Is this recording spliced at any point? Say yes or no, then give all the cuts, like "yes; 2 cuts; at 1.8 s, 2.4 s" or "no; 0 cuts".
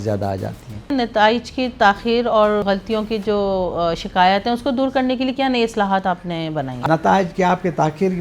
yes; 3 cuts; at 0.9 s, 2.6 s, 6.8 s